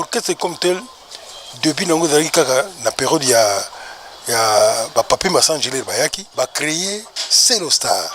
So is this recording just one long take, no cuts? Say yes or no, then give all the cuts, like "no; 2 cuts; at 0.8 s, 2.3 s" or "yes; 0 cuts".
no; 1 cut; at 6.2 s